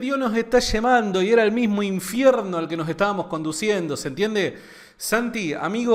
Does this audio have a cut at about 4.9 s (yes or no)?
no